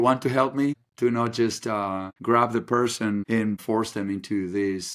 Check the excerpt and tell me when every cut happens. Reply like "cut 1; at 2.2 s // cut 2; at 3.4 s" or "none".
cut 1; at 0.9 s // cut 2; at 2.1 s // cut 3; at 3.5 s